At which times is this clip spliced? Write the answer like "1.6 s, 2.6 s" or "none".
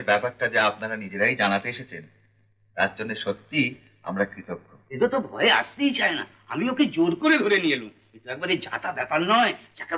none